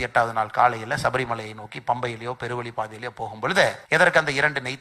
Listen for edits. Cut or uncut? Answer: cut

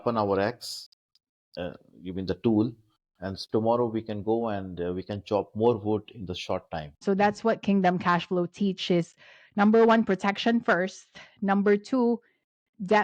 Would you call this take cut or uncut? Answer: cut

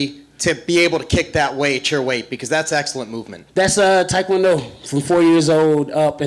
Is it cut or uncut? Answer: uncut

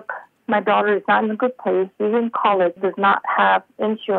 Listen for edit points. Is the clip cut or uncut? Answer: uncut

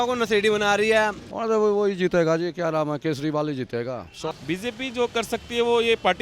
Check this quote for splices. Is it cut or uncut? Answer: cut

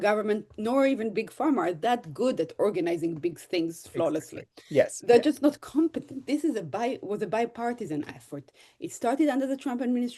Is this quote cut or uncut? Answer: cut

